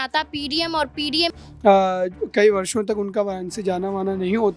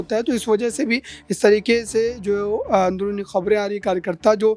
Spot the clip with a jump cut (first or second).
first